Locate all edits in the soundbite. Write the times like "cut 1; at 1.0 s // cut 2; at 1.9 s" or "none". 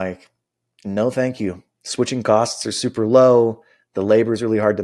none

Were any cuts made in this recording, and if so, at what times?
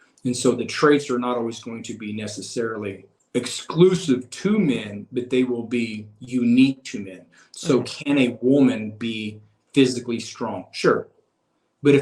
cut 1; at 3.1 s

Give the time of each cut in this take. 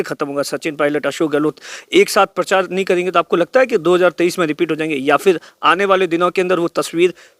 none

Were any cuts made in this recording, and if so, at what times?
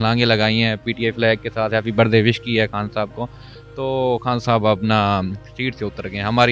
none

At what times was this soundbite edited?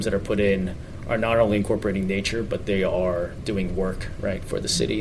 none

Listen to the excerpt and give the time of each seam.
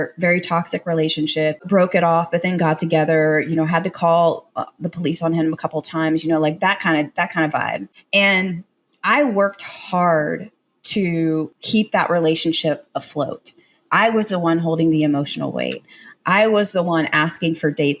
cut 1; at 1.6 s // cut 2; at 11.6 s

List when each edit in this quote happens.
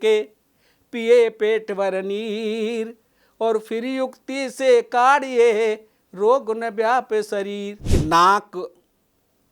cut 1; at 7.7 s

